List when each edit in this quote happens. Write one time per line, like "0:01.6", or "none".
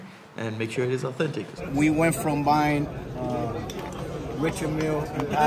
0:01.6